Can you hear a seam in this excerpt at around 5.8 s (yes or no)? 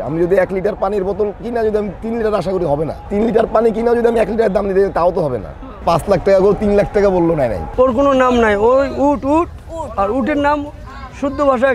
yes